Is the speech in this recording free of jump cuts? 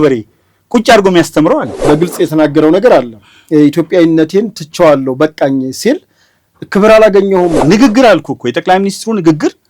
no; 2 cuts; at 1.8 s, 7.6 s

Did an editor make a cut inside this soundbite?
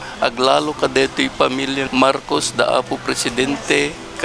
yes; 1 cut; at 1.8 s

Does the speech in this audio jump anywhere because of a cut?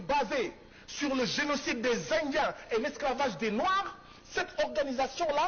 no; 0 cuts

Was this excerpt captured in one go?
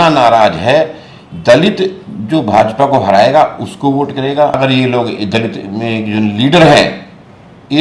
no; 1 cut; at 4.5 s

